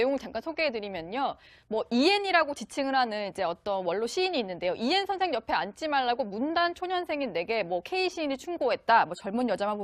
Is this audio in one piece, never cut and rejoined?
no; 1 cut; at 8.4 s

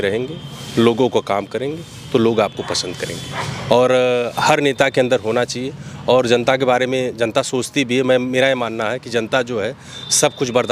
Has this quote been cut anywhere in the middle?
no; 0 cuts

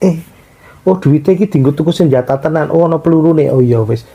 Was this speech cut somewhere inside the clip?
no; 0 cuts

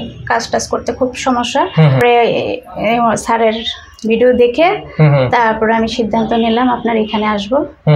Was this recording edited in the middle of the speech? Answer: yes; 1 cut; at 2.0 s

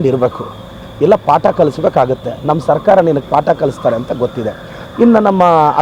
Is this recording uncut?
yes; 0 cuts

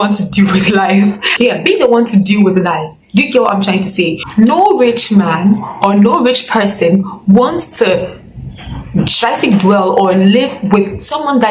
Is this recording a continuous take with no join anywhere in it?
no; 2 cuts; at 1.2 s, 4.2 s

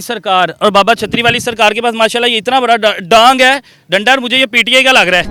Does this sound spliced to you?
no; 0 cuts

